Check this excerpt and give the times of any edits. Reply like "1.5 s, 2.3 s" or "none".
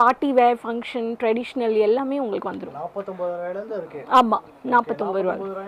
none